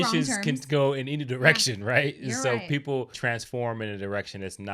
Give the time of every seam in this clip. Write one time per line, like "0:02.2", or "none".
0:03.1